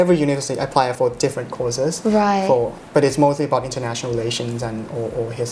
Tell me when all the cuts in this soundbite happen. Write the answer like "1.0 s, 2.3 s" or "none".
1.0 s, 2.8 s